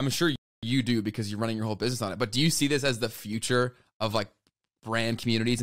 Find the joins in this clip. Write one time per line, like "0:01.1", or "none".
none